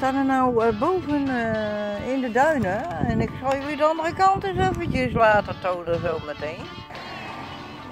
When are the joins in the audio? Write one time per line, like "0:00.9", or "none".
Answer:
0:06.9